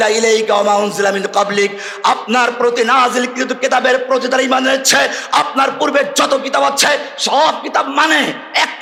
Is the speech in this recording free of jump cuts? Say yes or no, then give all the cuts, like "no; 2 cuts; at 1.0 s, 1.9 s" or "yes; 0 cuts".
yes; 0 cuts